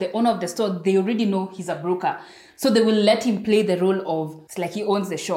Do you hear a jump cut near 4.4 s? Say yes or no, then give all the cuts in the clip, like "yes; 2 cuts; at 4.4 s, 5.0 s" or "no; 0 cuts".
yes; 1 cut; at 4.4 s